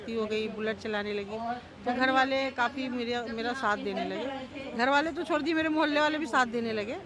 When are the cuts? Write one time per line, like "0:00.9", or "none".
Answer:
none